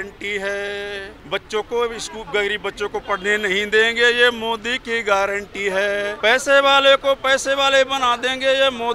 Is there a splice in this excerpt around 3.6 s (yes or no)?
no